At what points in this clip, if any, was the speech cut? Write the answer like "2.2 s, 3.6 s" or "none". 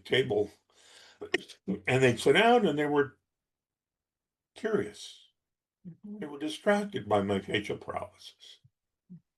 none